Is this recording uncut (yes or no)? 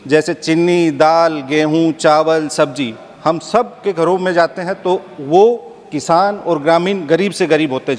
yes